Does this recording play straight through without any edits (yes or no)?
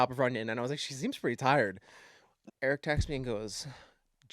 no